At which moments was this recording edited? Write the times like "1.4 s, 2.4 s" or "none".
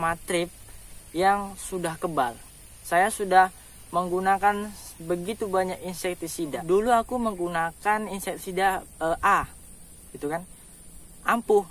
6.6 s